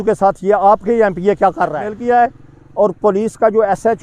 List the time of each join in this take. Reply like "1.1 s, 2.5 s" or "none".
1.9 s